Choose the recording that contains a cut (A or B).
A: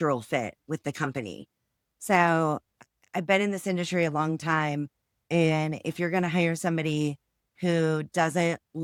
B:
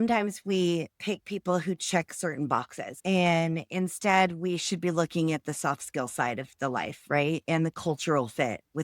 B